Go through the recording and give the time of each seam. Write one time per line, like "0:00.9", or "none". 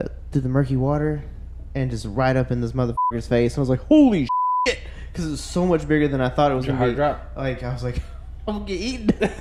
none